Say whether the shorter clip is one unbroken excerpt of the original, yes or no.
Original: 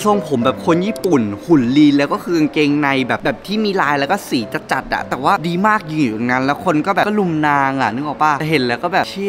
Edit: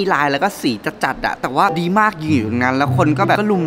yes